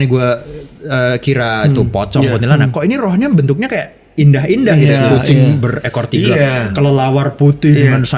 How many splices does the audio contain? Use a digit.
0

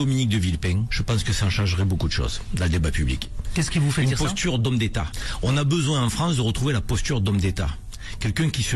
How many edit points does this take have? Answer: 0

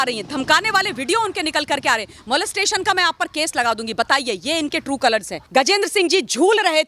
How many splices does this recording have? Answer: 1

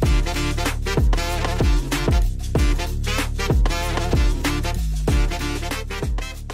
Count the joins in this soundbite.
0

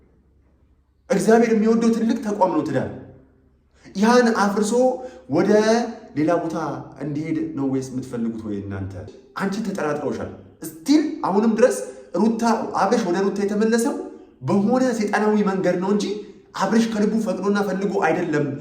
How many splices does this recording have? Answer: 1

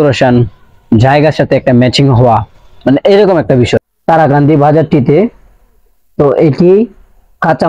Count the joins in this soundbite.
1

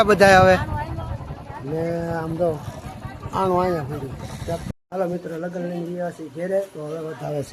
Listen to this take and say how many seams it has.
1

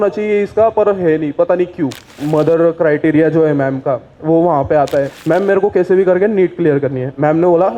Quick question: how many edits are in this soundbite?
2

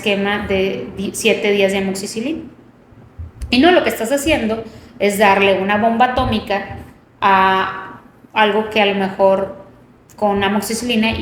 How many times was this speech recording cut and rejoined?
0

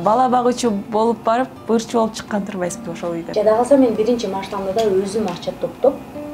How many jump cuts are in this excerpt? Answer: 1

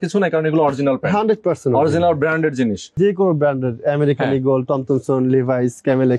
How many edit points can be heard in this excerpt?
1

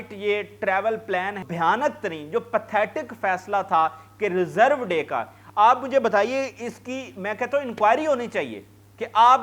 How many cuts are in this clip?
1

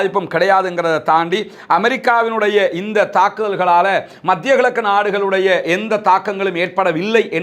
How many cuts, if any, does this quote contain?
0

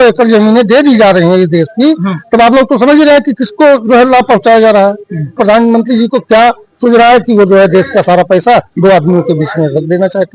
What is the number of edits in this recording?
1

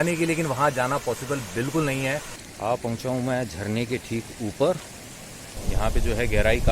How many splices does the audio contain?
2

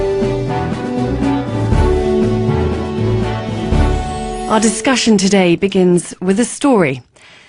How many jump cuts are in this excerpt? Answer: 0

